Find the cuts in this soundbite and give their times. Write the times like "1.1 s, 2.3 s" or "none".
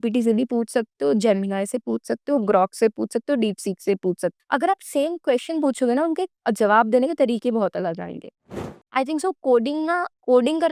8.5 s